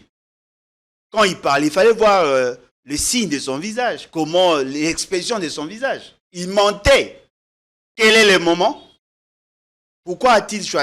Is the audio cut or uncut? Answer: cut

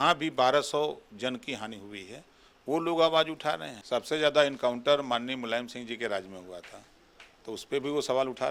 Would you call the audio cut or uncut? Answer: cut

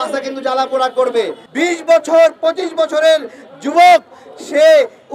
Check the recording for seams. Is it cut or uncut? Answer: cut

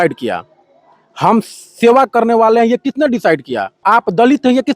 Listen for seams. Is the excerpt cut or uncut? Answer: cut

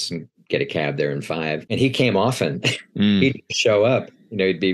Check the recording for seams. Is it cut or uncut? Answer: cut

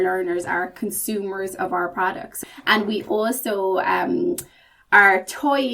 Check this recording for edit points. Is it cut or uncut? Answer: cut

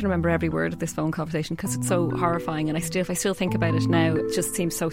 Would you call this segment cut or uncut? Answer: uncut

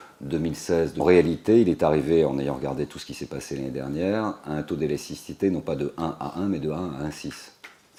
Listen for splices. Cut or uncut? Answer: uncut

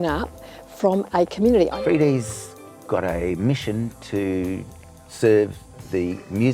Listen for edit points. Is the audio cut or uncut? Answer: cut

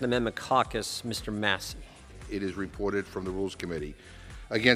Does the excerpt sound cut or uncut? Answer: cut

